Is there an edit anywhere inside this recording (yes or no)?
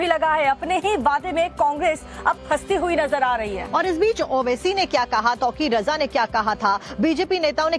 yes